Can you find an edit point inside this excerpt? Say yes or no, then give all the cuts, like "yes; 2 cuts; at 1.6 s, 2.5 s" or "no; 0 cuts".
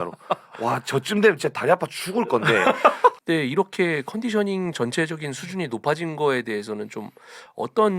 yes; 1 cut; at 3.2 s